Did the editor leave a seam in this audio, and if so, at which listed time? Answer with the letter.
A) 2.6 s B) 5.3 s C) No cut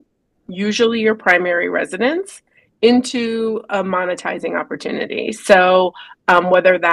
C